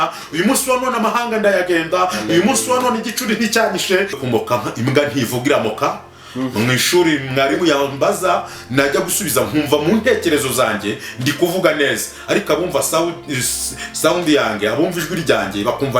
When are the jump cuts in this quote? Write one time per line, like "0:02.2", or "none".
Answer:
0:04.2